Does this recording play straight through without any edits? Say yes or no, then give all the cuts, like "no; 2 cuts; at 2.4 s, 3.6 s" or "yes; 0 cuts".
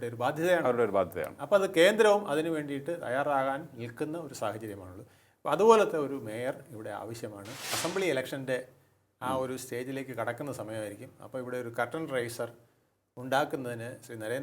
no; 1 cut; at 7.8 s